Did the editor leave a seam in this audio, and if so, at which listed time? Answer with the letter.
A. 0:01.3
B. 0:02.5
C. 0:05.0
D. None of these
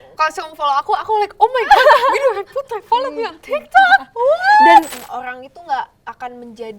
C